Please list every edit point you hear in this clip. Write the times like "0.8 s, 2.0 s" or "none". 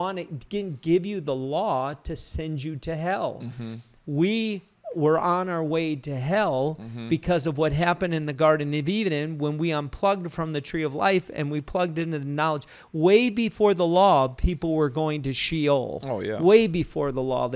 none